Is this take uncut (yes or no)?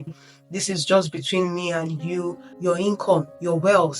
no